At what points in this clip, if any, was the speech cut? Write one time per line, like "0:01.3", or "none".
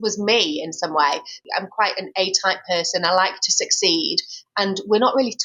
0:01.4